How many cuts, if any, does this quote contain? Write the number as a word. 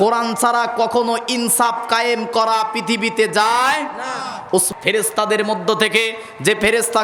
one